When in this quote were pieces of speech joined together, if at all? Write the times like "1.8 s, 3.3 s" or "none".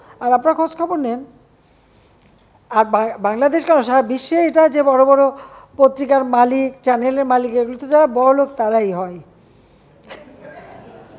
none